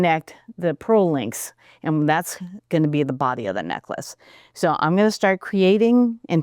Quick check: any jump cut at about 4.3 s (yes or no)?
yes